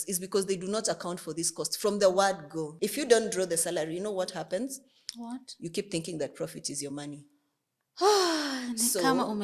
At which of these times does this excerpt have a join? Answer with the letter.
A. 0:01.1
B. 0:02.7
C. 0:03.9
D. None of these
B